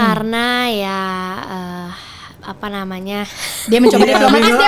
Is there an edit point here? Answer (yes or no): no